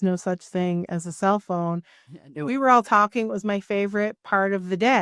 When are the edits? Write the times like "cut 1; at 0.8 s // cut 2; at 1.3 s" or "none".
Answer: none